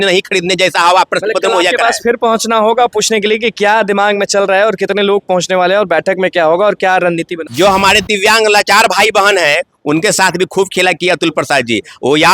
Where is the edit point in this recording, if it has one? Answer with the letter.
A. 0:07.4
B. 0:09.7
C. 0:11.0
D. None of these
A